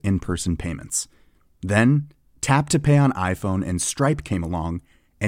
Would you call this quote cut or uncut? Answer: uncut